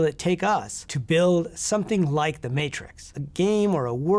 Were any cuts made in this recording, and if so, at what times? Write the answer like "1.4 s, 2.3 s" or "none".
3.1 s